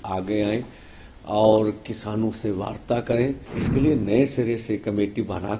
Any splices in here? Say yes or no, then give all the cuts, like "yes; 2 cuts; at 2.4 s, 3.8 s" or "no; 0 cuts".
yes; 1 cut; at 3.5 s